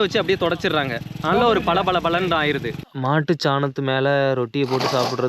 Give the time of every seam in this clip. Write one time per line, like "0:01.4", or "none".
0:02.9